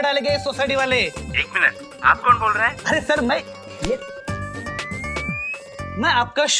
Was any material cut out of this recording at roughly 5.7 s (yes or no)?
yes